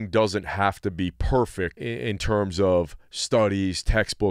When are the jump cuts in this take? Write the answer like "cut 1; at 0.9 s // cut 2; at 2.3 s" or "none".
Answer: cut 1; at 1.8 s